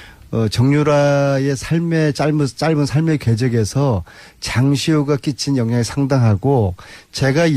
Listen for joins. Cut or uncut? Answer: uncut